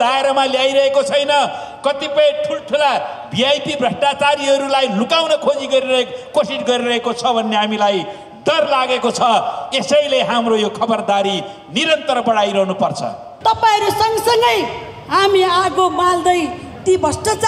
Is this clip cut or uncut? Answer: cut